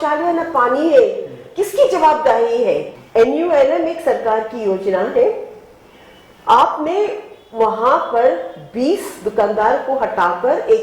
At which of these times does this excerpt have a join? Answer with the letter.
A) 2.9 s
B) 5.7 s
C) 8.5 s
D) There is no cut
A